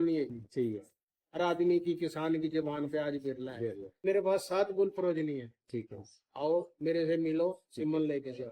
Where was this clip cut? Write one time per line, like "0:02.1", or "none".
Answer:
0:04.0